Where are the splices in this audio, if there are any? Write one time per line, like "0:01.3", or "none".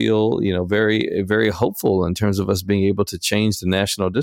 none